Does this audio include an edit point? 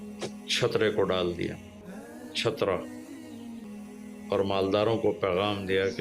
yes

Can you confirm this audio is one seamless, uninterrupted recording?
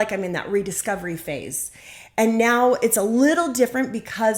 yes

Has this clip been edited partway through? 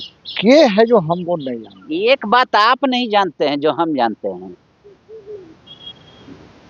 no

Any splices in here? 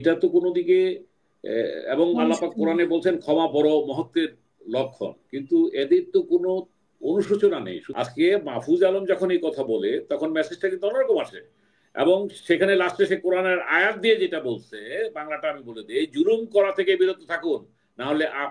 yes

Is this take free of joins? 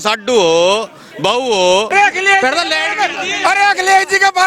no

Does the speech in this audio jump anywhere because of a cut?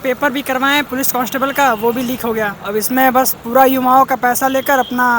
yes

